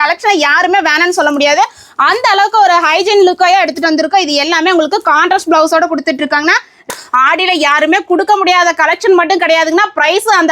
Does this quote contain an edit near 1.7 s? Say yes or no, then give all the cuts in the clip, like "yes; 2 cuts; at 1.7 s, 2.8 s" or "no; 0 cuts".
no; 1 cut; at 6.9 s